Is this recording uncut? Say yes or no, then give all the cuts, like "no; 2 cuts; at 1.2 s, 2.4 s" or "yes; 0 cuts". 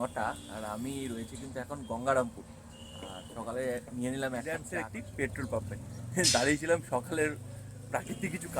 no; 1 cut; at 4.7 s